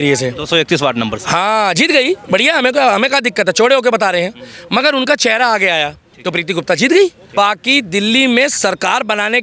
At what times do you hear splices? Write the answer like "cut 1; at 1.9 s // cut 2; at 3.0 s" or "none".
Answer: cut 1; at 7.2 s